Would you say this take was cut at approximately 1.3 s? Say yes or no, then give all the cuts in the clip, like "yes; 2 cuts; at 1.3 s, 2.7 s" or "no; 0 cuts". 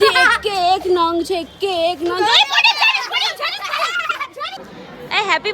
no; 1 cut; at 4.6 s